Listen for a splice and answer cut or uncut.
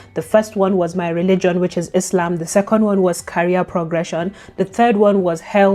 uncut